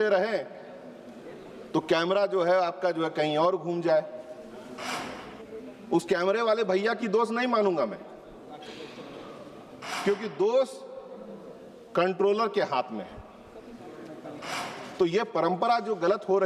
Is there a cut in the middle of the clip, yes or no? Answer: no